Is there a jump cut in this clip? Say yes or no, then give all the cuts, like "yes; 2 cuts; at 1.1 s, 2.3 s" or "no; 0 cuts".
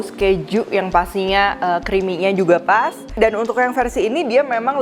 no; 0 cuts